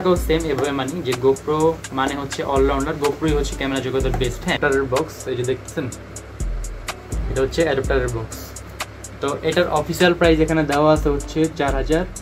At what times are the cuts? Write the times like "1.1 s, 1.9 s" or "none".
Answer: 4.6 s